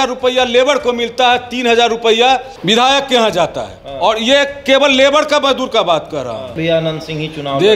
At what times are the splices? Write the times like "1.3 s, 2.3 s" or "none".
2.5 s, 6.5 s